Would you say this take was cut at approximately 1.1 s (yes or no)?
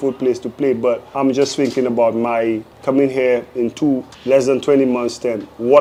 no